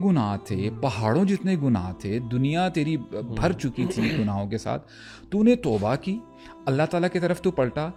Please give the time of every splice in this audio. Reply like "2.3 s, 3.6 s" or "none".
none